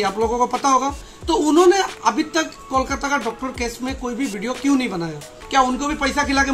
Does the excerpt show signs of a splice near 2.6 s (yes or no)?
no